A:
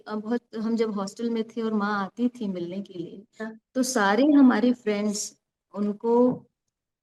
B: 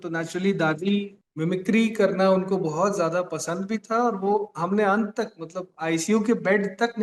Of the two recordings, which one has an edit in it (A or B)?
B